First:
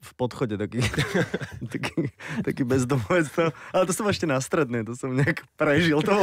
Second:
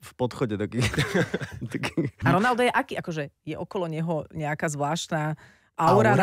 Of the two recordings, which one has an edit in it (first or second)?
second